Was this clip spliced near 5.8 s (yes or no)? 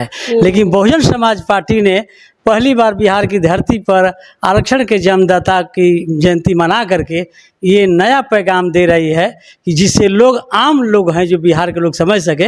no